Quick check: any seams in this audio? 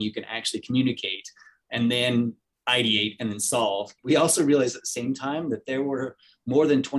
yes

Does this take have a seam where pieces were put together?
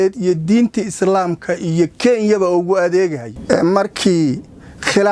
yes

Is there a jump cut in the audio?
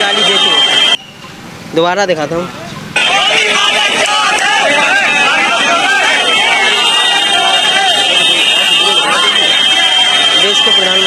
no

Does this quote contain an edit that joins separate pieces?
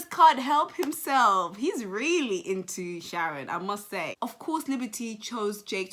no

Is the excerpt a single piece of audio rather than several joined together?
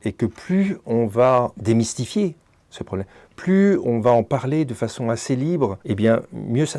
no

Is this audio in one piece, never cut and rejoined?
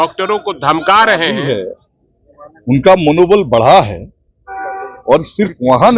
no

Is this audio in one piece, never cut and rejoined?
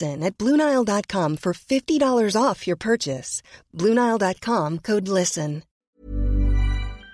no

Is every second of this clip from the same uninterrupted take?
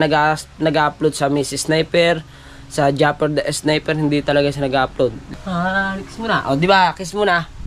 no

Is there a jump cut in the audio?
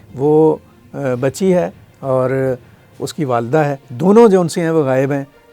yes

